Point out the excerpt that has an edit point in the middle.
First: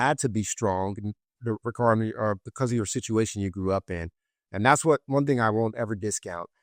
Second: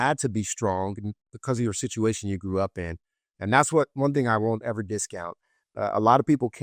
second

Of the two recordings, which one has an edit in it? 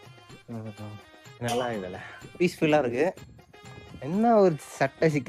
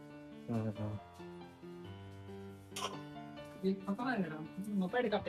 first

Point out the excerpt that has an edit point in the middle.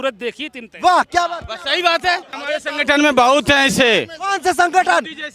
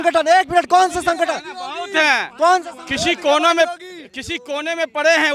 first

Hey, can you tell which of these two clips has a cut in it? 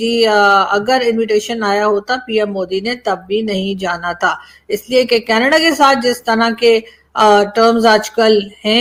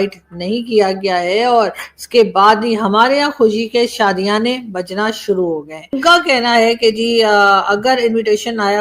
second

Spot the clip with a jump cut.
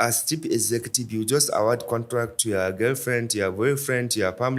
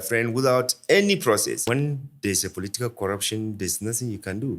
second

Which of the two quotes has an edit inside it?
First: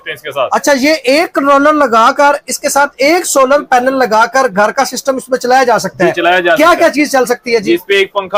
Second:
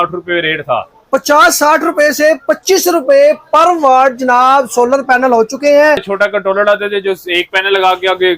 second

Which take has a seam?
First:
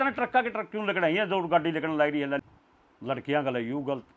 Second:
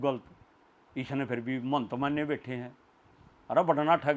first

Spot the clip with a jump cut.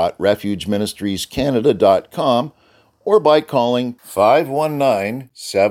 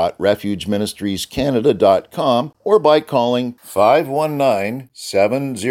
second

